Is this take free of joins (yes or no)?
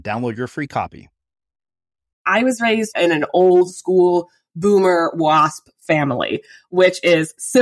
no